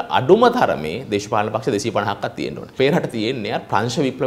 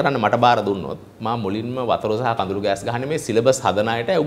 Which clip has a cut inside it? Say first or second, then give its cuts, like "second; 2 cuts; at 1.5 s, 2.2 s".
first; 1 cut; at 2.7 s